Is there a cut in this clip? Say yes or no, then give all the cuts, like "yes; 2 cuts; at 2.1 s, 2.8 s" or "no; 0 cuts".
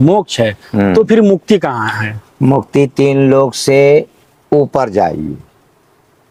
no; 0 cuts